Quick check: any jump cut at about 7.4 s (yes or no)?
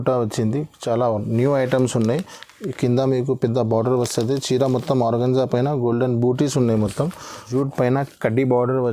yes